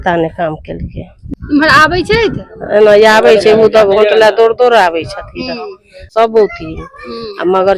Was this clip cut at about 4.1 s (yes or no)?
no